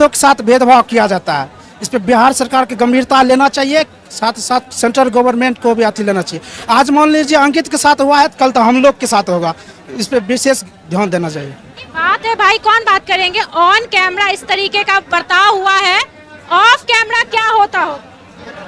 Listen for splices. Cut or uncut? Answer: uncut